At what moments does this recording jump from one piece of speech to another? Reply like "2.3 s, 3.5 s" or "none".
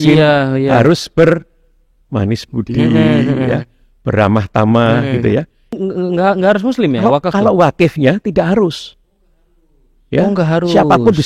5.6 s